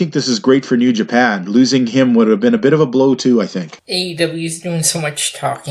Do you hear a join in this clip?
yes; 1 cut; at 3.8 s

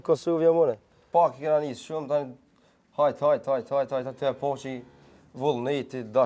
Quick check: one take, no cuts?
no; 1 cut; at 0.9 s

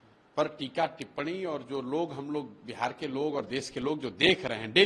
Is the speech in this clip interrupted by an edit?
no; 0 cuts

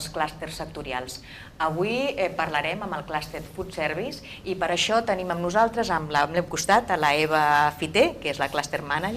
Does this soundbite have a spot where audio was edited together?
yes; 1 cut; at 3.7 s

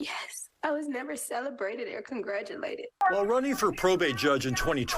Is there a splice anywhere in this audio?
yes; 1 cut; at 3.0 s

